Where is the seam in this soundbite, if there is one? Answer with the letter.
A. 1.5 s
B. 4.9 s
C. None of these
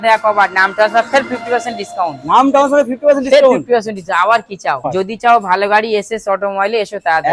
B